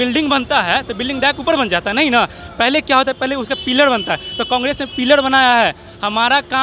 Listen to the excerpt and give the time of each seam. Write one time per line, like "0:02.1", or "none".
none